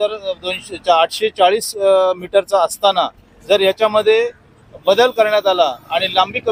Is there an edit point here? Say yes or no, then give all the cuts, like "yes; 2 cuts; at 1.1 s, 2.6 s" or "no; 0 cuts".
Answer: no; 0 cuts